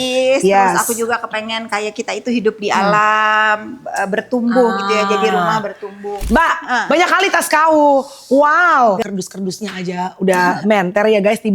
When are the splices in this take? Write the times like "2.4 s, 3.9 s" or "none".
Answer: 6.2 s, 9.0 s